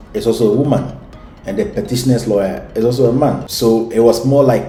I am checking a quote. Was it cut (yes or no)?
no